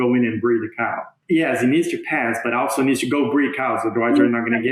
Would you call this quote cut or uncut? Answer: cut